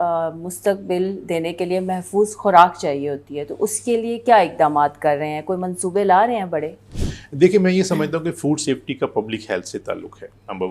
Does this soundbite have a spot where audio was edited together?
no; 0 cuts

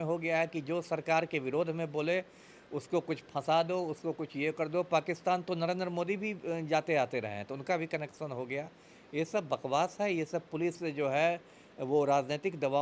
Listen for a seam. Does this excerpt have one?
no; 0 cuts

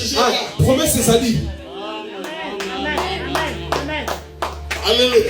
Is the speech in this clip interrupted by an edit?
no; 0 cuts

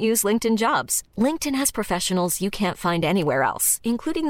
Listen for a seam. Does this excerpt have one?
no; 0 cuts

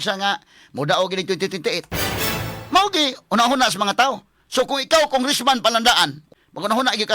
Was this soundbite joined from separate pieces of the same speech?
yes; 1 cut; at 6.2 s

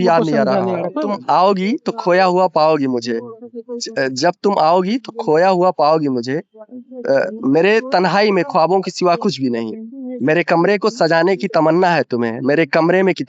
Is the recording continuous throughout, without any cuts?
no; 1 cut; at 1.0 s

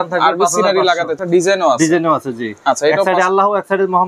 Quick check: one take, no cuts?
no; 1 cut; at 1.1 s

